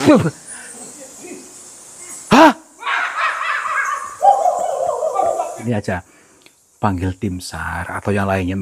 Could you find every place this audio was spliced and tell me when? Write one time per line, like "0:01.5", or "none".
0:05.7